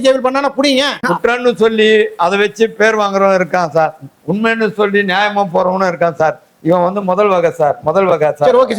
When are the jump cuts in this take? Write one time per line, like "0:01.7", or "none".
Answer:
0:00.9